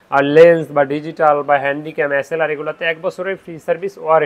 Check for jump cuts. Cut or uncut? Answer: uncut